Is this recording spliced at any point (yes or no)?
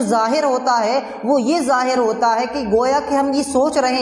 no